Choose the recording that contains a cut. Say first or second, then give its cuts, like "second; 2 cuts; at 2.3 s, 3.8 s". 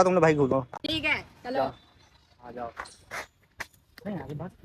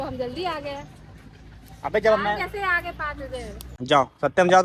second; 1 cut; at 3.6 s